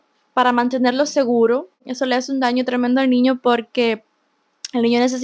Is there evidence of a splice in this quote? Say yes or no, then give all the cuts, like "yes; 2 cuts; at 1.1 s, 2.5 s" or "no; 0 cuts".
yes; 1 cut; at 1.9 s